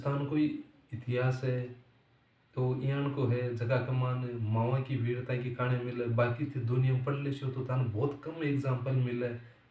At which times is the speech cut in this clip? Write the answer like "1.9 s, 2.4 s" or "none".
none